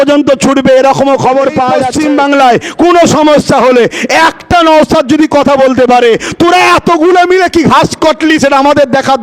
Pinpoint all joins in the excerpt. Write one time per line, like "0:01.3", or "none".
0:01.8